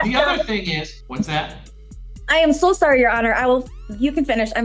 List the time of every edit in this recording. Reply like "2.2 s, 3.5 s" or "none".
1.0 s